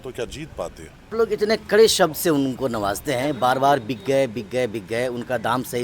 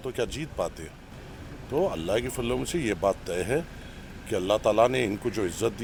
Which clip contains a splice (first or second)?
first